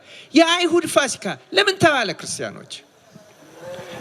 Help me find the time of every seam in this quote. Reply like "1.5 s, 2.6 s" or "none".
none